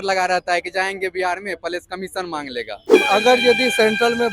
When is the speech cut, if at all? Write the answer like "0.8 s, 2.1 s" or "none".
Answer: 2.9 s